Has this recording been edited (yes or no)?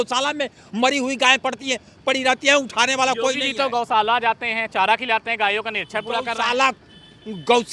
no